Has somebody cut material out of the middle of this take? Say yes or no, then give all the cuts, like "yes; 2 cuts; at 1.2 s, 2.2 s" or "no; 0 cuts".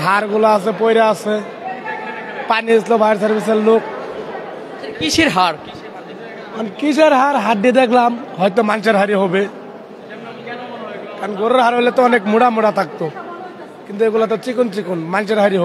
no; 0 cuts